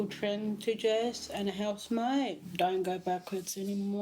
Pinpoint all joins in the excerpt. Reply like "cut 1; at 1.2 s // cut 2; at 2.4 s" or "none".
cut 1; at 2.5 s

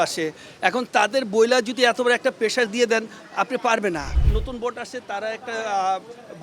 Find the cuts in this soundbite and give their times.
cut 1; at 4.1 s

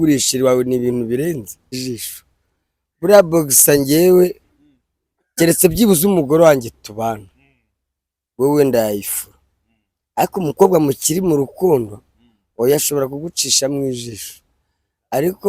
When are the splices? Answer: cut 1; at 1.8 s

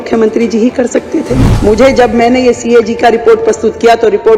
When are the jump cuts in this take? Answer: cut 1; at 1.4 s

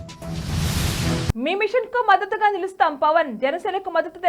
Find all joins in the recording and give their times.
cut 1; at 1.3 s

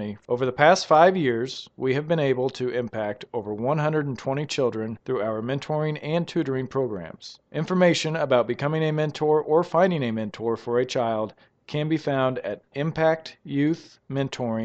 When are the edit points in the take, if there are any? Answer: none

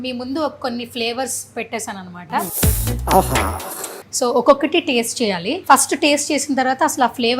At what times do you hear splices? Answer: cut 1; at 2.5 s // cut 2; at 4.0 s // cut 3; at 5.5 s

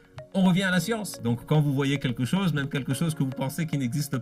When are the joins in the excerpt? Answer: cut 1; at 1.1 s

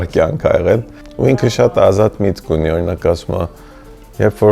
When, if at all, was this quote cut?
cut 1; at 1.0 s

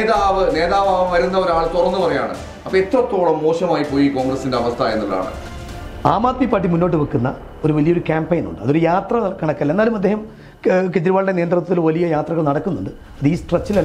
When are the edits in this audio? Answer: cut 1; at 5.4 s

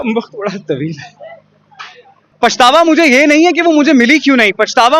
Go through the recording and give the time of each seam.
cut 1; at 2.3 s

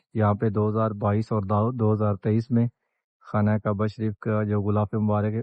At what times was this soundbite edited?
none

